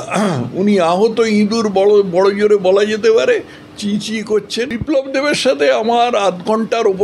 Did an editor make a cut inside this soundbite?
yes; 1 cut; at 4.8 s

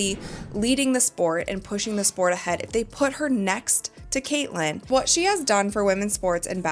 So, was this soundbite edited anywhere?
yes; 1 cut; at 4.8 s

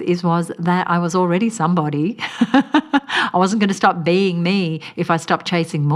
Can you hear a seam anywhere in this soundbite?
no; 0 cuts

